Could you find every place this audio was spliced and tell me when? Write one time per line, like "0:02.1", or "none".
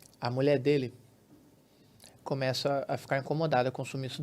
none

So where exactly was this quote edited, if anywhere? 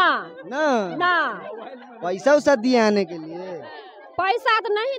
none

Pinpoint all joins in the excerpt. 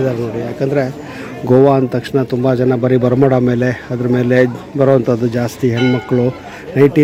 none

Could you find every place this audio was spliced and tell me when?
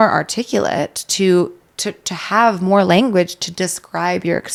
none

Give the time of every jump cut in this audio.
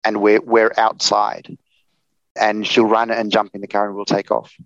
0:02.3

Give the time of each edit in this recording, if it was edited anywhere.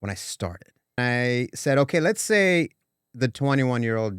0:01.0

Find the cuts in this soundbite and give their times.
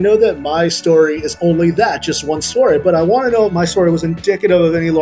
0:03.5

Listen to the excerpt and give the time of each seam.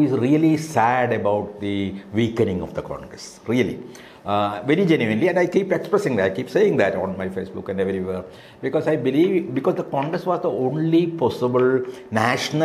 none

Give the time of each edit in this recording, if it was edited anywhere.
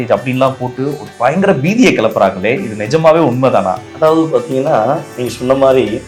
none

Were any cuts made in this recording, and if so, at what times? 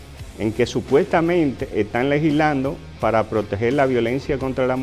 none

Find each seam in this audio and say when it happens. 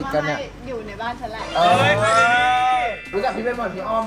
0:03.0

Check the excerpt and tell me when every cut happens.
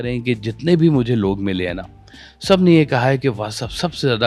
none

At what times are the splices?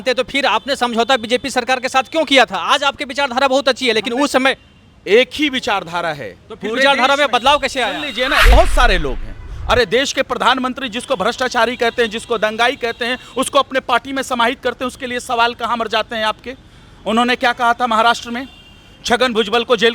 0:08.5

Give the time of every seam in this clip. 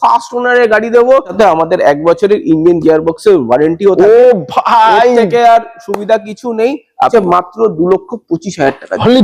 0:01.3
0:07.1

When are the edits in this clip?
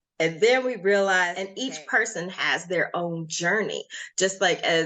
0:01.5

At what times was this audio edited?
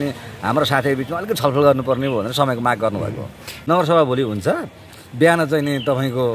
0:03.5

